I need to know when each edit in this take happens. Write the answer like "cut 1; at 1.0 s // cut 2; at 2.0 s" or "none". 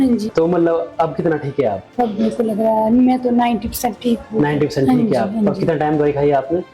cut 1; at 1.8 s